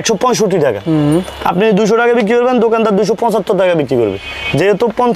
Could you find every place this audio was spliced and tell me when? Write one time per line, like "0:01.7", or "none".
none